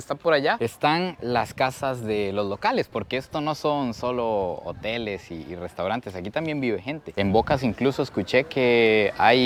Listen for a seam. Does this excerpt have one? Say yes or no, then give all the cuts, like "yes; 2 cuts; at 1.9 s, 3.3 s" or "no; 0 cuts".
no; 0 cuts